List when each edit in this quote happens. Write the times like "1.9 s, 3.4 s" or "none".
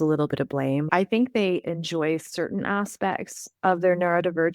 0.9 s